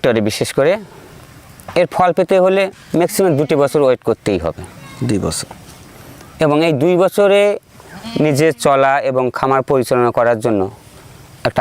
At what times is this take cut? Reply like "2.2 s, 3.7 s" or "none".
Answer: none